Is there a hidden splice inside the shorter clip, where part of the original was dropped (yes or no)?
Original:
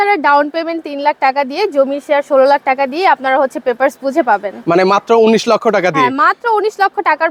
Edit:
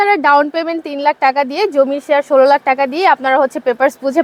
no